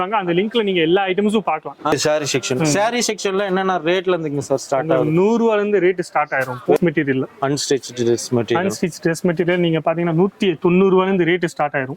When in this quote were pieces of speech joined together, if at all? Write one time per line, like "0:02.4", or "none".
0:01.9
0:06.8